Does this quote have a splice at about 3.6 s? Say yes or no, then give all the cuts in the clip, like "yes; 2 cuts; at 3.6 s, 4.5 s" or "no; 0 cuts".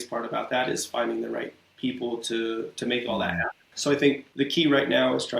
yes; 2 cuts; at 3.6 s, 4.3 s